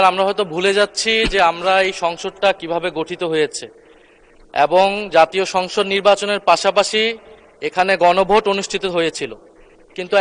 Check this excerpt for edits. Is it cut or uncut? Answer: uncut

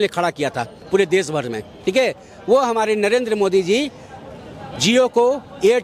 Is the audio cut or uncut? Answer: uncut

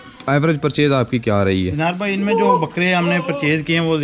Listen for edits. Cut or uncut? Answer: uncut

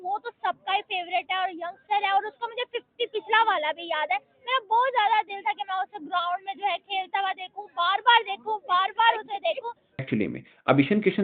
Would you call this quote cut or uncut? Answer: cut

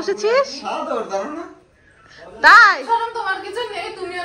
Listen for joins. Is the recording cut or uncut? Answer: uncut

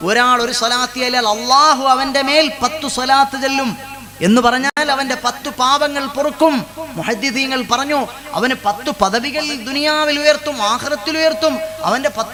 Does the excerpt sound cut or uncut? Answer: uncut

